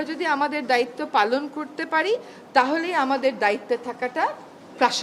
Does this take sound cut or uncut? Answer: uncut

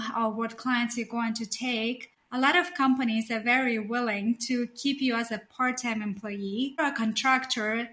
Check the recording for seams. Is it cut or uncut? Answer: cut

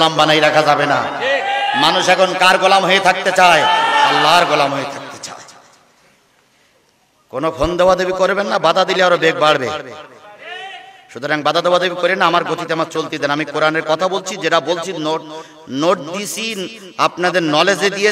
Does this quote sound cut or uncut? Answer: uncut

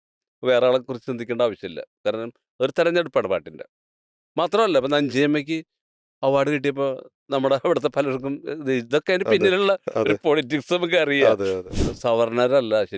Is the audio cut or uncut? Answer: cut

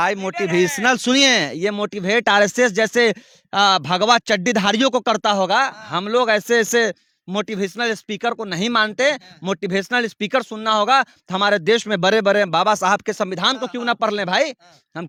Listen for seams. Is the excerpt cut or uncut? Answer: uncut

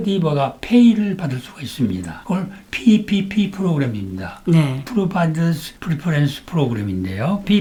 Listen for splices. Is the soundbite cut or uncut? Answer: uncut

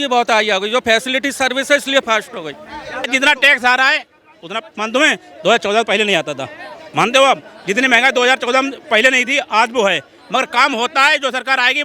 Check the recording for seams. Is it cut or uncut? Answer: cut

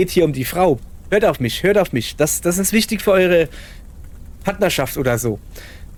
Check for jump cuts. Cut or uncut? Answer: uncut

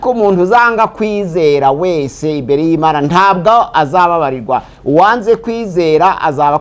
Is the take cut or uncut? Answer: uncut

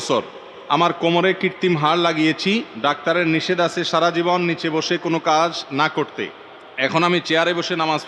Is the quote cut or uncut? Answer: cut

